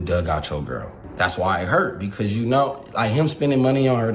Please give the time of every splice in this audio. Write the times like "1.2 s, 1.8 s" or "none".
1.0 s